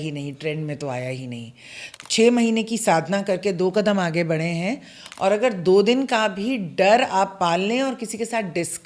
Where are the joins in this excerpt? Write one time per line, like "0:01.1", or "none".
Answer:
0:01.8